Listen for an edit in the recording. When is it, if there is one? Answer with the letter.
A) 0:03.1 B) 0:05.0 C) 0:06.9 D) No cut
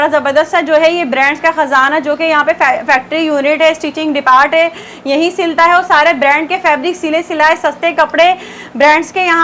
D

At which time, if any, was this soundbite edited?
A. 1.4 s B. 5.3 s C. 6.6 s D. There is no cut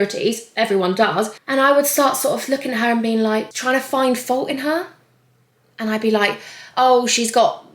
A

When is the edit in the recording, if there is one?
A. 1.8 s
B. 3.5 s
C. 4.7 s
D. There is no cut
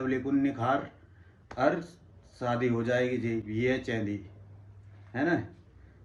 D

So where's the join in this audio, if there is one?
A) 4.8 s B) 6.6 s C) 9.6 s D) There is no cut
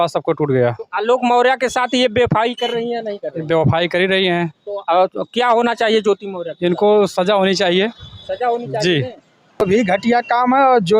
C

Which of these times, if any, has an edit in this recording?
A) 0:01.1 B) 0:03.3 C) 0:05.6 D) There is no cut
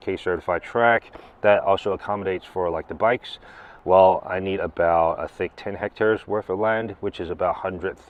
D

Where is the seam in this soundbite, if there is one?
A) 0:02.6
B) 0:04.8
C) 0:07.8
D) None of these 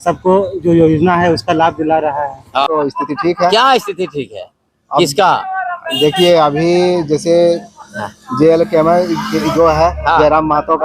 A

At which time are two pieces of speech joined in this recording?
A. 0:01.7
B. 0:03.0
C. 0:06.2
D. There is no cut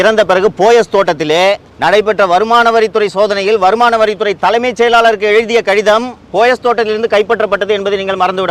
A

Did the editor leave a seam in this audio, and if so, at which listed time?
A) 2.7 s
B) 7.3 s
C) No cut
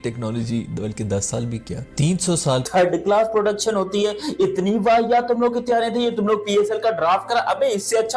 A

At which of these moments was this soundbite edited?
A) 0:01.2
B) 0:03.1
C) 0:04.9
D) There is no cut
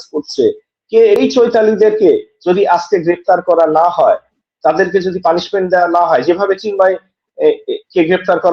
A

